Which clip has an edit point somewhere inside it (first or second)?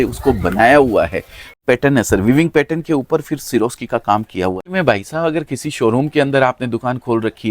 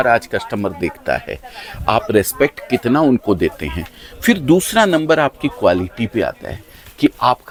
first